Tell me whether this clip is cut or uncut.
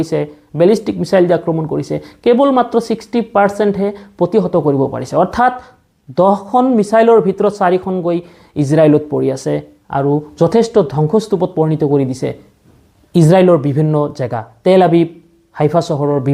uncut